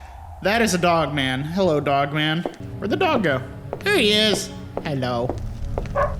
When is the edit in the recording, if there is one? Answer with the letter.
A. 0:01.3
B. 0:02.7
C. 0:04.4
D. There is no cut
B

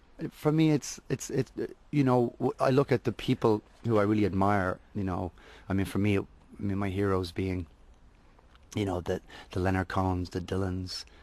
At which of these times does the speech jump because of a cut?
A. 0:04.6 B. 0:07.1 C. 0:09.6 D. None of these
C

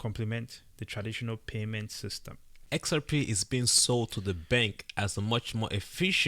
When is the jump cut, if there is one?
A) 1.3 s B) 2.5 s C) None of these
B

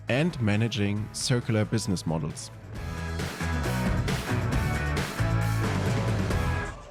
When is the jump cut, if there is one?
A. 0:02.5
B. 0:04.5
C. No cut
C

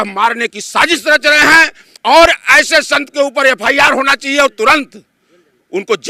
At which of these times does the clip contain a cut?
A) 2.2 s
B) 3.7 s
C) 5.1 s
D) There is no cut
D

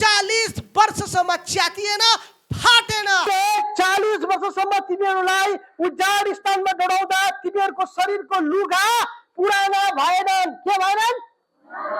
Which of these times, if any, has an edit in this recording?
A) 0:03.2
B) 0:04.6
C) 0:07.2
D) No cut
A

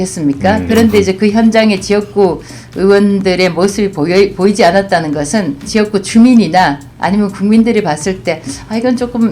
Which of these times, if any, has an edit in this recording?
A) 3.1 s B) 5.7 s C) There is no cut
B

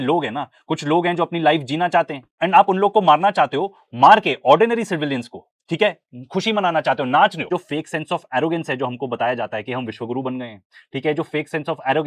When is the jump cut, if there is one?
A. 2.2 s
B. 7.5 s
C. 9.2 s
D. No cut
B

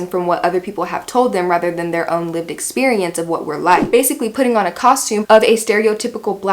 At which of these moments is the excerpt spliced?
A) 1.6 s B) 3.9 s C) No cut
B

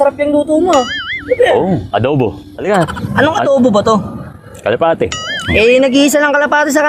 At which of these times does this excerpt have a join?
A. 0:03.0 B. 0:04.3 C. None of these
A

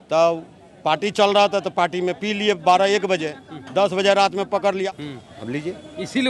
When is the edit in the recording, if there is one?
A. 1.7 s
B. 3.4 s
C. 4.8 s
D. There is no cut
C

